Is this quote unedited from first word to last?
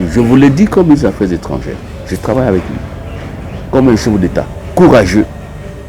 yes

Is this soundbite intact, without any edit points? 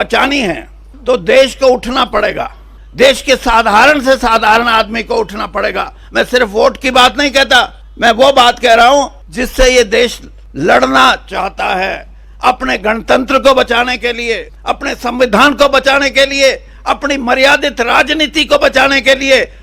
yes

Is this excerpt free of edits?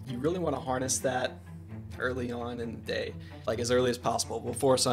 yes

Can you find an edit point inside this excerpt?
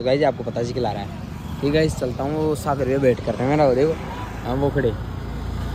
no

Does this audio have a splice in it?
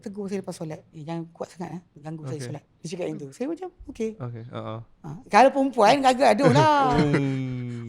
yes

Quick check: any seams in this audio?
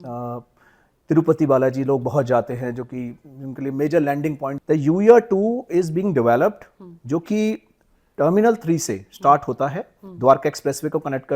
yes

